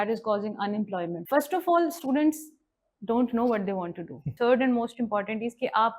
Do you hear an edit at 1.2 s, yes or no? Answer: yes